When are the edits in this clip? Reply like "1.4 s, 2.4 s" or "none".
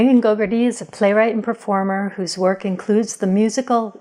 none